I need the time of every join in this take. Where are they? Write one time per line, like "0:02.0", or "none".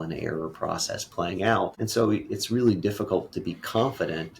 0:01.8